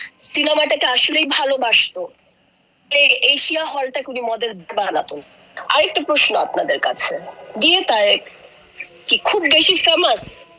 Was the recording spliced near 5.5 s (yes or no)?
yes